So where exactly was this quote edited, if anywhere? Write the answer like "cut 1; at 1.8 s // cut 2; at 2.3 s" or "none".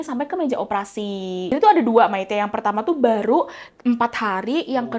cut 1; at 1.5 s